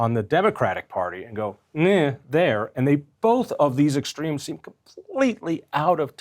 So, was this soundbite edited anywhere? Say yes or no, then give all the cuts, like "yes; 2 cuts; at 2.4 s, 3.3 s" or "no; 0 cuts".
no; 0 cuts